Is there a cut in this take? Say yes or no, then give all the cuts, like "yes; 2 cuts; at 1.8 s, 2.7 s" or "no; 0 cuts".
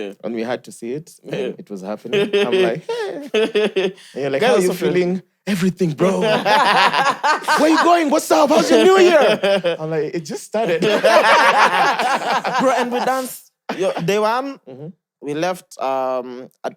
no; 0 cuts